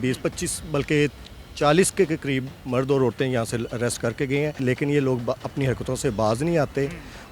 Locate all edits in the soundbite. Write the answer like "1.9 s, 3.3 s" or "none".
4.6 s

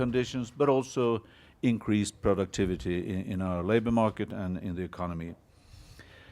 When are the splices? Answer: 2.2 s

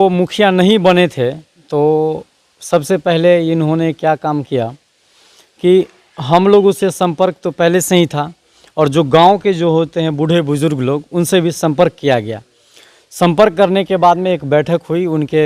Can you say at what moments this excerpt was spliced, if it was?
none

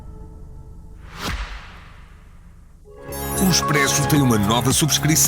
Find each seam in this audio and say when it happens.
1.0 s

